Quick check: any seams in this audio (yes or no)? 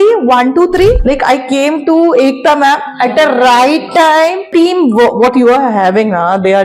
yes